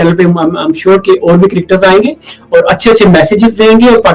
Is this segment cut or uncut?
uncut